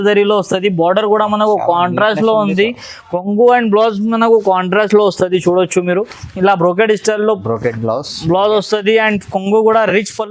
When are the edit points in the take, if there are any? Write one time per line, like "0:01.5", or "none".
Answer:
none